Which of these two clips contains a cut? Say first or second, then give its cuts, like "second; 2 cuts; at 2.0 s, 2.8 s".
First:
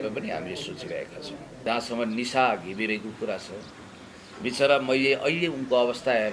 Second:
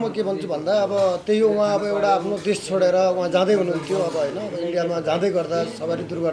first; 1 cut; at 1.6 s